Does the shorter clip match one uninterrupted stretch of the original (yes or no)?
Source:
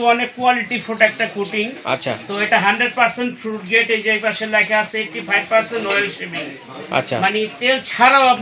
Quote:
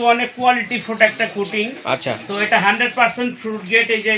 yes